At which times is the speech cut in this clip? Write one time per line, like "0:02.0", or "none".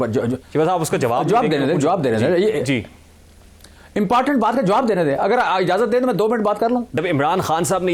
0:06.9